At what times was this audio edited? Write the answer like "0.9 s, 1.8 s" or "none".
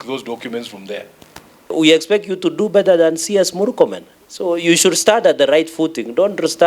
1.7 s